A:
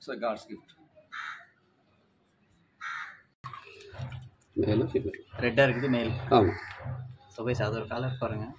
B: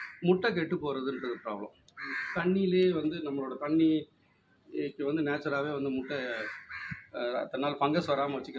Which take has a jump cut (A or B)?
A